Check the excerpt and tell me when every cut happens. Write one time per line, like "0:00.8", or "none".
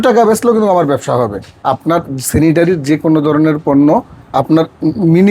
0:01.5